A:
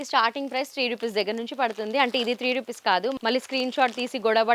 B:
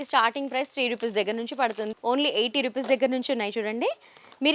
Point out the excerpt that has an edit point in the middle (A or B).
B